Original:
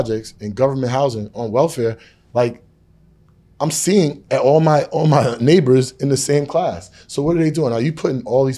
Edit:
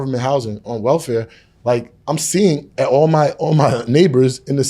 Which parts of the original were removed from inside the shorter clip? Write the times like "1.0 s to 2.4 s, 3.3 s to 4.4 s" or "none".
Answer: 2.6 s to 3.5 s